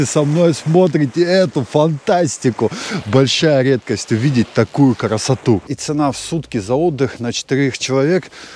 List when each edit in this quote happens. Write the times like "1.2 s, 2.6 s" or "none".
5.8 s